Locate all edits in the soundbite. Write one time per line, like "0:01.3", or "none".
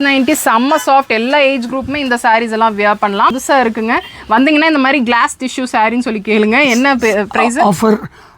0:03.4